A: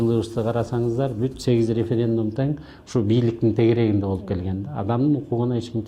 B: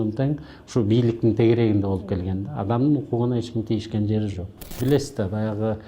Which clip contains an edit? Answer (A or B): B